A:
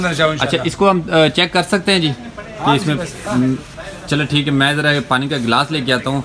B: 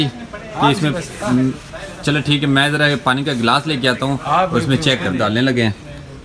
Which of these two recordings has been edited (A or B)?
B